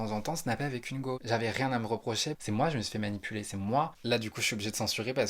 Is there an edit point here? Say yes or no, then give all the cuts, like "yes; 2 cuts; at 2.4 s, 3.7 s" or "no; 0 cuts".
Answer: yes; 3 cuts; at 1.2 s, 2.4 s, 3.9 s